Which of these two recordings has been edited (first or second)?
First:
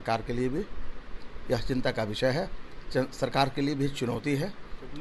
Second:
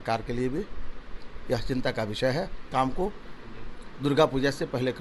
second